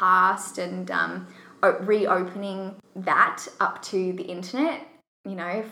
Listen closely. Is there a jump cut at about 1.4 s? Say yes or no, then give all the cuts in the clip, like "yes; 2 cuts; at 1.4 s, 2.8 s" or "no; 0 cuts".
no; 1 cut; at 2.8 s